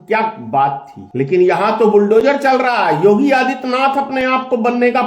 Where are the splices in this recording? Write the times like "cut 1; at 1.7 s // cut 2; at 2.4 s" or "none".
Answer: cut 1; at 0.9 s